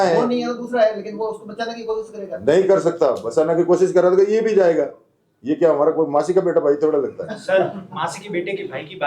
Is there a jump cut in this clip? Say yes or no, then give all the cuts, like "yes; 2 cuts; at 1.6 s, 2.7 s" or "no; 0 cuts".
no; 0 cuts